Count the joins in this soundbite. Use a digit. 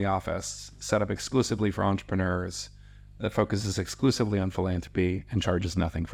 0